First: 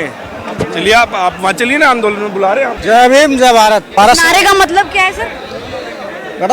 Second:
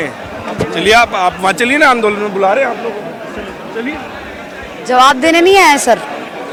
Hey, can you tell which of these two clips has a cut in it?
first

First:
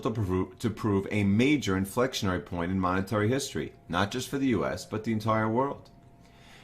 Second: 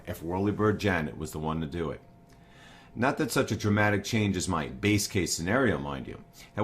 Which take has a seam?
second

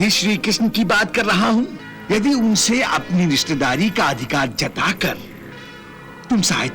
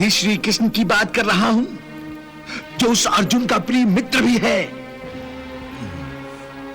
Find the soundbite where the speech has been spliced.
first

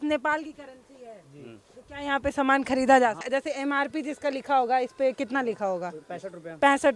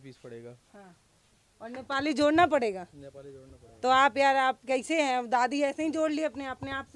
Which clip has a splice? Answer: first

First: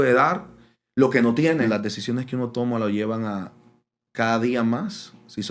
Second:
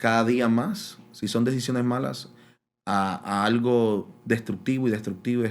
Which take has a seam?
first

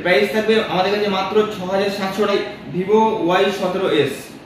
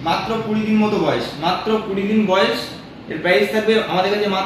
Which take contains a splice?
first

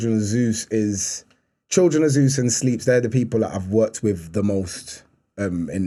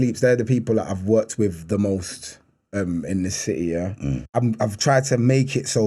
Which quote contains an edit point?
second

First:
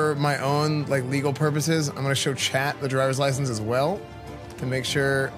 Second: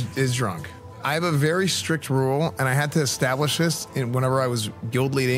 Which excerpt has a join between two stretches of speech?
second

